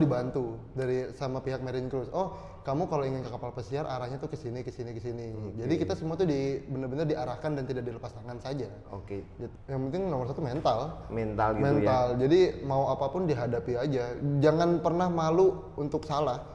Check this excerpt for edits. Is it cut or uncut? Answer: cut